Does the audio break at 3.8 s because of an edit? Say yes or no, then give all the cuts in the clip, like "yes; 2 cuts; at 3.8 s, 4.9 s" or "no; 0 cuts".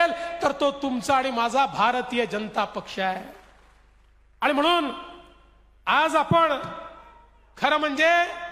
no; 0 cuts